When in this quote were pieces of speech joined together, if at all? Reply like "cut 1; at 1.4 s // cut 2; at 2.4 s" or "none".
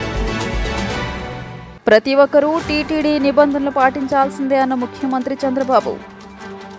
cut 1; at 1.1 s